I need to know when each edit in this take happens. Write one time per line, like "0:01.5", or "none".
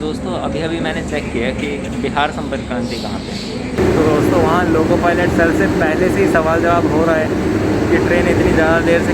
0:01.9
0:03.8